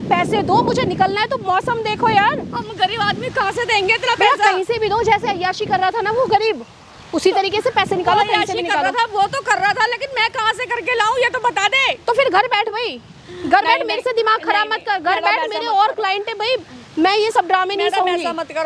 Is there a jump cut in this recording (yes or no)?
no